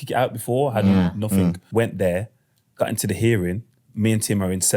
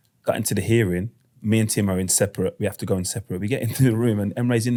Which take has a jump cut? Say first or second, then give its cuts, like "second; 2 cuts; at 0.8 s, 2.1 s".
first; 1 cut; at 1.6 s